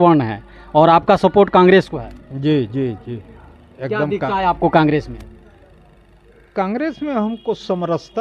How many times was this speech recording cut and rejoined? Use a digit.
0